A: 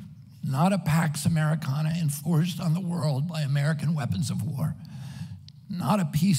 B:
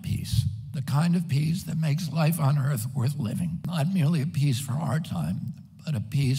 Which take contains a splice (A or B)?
B